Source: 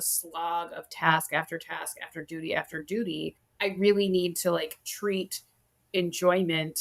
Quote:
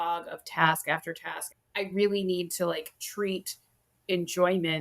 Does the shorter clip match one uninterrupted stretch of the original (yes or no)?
no